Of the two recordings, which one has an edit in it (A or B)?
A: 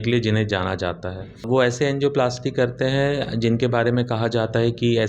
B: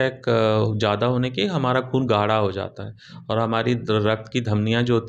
A